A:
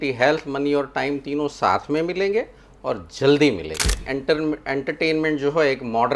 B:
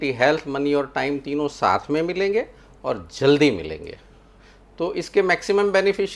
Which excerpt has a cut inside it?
A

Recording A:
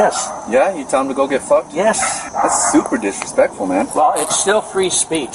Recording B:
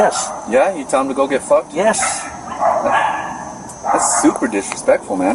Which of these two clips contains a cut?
A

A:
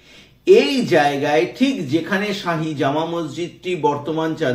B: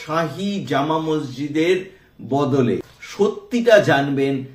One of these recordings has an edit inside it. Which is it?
B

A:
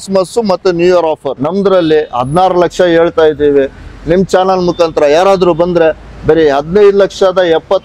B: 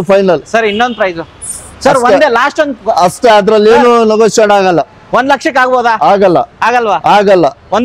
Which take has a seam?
A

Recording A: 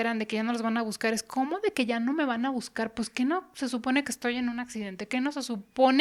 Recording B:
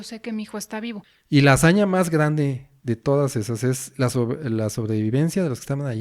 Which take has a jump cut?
B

